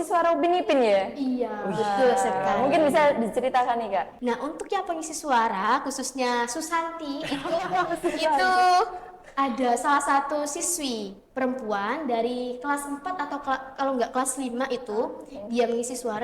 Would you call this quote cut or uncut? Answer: cut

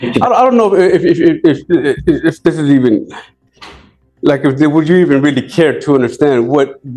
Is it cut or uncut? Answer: uncut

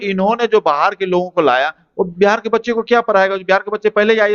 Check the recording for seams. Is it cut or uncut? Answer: uncut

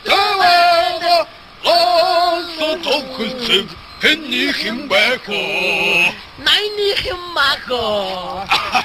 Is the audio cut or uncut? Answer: cut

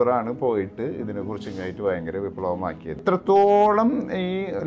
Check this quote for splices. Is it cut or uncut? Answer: cut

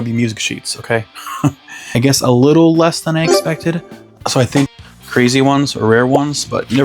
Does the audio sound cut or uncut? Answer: cut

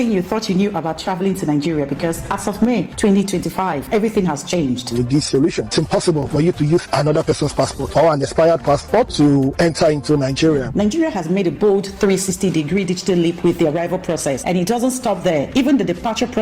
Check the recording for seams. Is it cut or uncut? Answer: uncut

